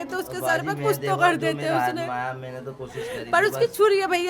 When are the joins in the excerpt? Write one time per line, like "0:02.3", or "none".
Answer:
none